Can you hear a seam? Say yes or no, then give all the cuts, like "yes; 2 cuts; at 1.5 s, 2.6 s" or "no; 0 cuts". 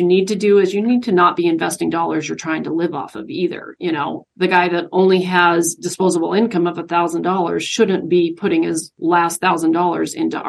yes; 2 cuts; at 4.2 s, 8.9 s